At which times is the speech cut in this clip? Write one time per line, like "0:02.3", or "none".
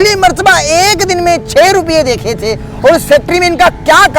none